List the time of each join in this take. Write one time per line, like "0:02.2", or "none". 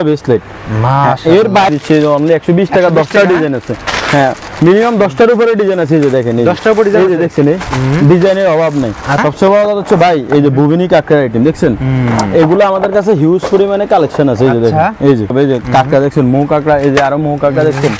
0:01.7
0:09.2
0:15.3